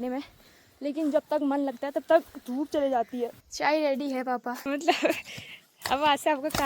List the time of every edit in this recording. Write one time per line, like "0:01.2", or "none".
0:03.4
0:04.5